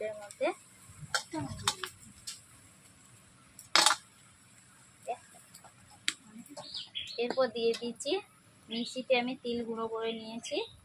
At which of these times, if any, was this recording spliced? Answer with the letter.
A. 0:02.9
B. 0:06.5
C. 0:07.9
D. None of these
B